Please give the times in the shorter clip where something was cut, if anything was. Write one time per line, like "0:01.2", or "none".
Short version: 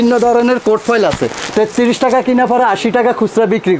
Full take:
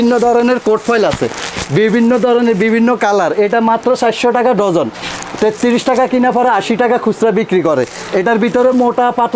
0:01.3